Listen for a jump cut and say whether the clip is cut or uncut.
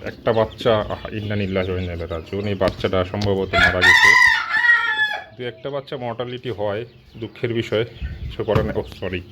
uncut